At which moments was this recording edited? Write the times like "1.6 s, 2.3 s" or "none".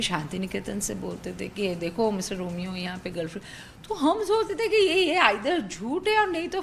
1.2 s